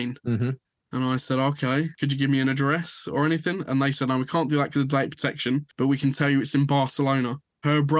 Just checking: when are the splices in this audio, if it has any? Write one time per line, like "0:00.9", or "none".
0:01.9